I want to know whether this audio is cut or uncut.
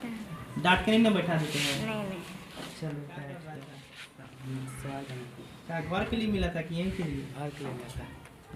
uncut